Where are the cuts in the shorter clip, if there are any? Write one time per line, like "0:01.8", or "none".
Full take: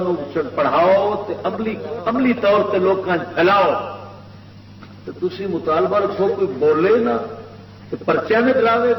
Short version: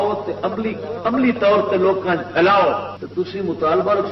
0:03.0